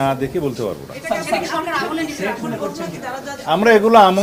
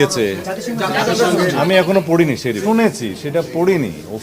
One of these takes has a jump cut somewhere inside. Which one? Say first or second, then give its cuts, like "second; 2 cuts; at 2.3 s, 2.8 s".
second; 1 cut; at 2.6 s